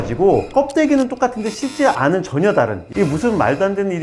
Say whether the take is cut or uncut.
cut